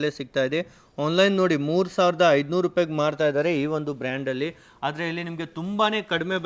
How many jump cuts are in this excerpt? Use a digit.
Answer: 0